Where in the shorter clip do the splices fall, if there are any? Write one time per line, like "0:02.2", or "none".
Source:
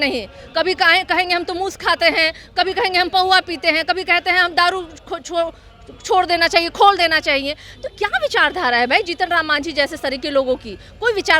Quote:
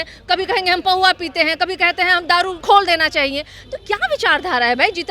0:02.6